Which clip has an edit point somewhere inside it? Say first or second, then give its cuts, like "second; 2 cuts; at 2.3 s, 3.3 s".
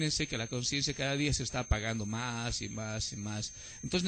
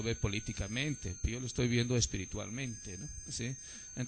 second; 1 cut; at 3.1 s